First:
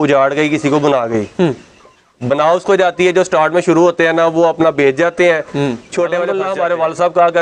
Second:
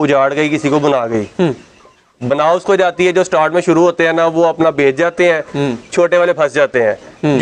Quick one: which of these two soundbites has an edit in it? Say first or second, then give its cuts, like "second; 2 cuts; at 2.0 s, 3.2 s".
first; 1 cut; at 6.5 s